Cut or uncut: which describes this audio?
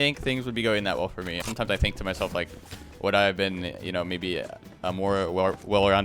cut